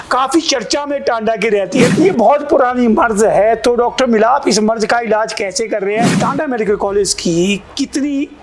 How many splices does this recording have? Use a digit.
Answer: 2